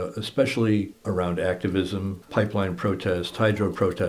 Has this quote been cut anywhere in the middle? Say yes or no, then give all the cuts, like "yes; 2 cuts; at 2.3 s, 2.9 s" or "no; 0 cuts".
yes; 2 cuts; at 1.0 s, 2.2 s